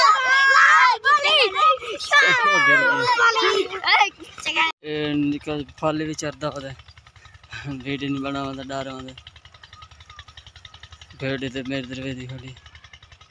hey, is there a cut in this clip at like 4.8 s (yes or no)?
yes